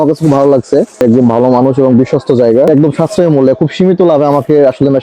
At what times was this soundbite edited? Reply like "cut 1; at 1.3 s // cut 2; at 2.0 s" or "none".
cut 1; at 1.0 s // cut 2; at 2.7 s